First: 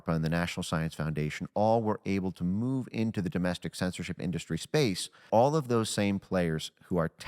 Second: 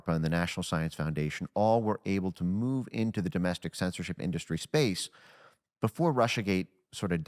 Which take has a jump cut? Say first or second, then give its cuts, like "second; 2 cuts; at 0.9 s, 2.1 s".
first; 1 cut; at 5.2 s